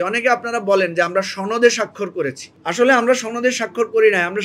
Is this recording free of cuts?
yes; 0 cuts

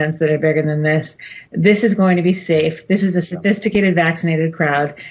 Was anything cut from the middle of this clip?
no; 0 cuts

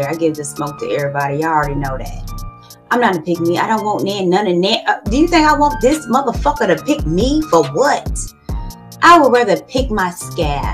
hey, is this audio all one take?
yes; 0 cuts

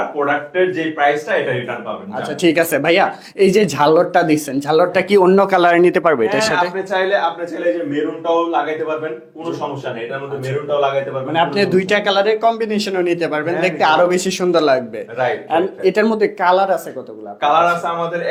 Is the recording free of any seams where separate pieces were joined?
yes; 0 cuts

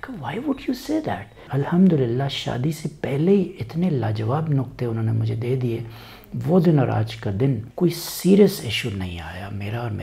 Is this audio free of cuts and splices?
no; 2 cuts; at 1.5 s, 7.7 s

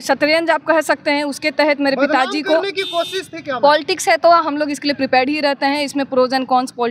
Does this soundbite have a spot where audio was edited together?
no; 0 cuts

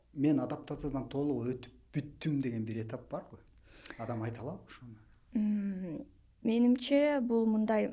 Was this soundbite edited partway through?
no; 0 cuts

